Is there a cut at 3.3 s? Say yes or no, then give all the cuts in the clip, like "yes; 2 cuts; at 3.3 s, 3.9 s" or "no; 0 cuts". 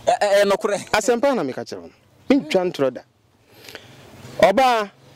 no; 0 cuts